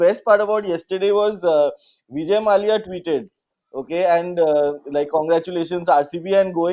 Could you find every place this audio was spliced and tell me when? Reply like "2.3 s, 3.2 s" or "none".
none